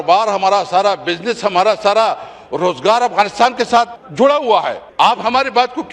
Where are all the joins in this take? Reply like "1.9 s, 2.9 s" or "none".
4.0 s, 4.8 s